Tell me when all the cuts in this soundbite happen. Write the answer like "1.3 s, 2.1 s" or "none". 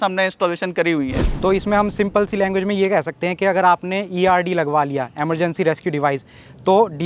none